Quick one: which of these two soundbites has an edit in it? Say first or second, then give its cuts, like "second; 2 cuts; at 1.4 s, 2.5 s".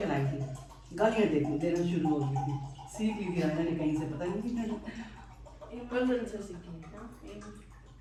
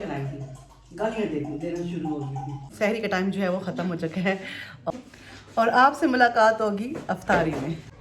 second; 2 cuts; at 2.6 s, 4.9 s